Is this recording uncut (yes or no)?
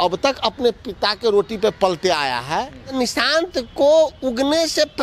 no